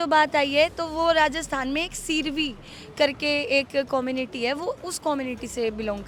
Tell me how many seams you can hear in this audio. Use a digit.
0